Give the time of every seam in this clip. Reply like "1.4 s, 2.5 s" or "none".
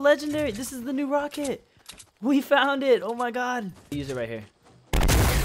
3.9 s